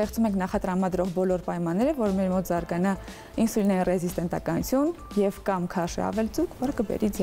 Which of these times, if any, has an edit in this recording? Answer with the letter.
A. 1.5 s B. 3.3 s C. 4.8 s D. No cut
D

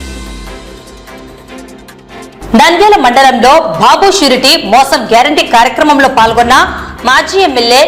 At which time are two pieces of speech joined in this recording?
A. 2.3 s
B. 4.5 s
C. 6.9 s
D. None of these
D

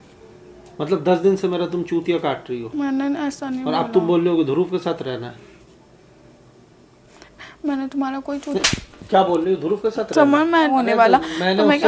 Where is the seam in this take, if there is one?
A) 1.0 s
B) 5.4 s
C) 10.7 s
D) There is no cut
C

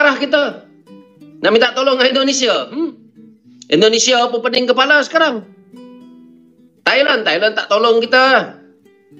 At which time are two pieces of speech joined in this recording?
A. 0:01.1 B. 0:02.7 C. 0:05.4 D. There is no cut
D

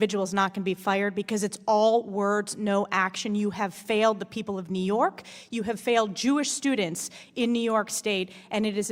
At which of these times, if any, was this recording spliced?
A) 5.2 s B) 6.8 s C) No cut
C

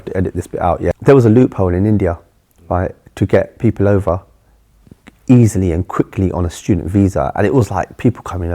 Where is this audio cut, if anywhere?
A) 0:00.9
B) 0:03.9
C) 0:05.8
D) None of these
A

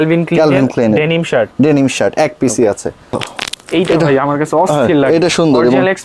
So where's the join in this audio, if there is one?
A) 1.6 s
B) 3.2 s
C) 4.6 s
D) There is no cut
B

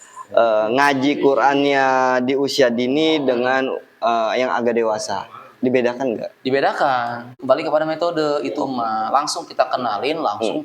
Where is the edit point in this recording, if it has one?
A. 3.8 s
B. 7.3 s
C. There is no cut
B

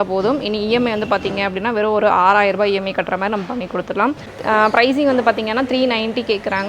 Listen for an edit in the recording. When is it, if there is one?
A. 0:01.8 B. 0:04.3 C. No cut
B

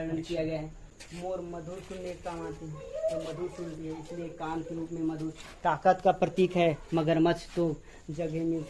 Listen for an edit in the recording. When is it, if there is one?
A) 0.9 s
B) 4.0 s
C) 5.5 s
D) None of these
A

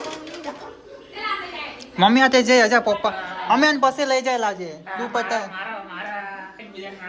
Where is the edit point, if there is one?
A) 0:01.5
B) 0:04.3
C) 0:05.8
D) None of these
D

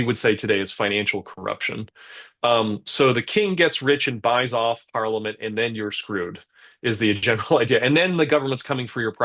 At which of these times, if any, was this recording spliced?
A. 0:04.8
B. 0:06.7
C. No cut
C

